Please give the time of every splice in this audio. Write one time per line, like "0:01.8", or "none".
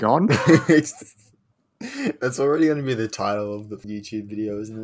0:03.8